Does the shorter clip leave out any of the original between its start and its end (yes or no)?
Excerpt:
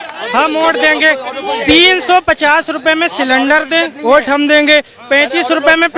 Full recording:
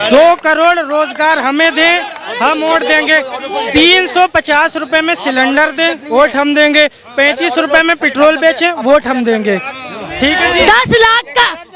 no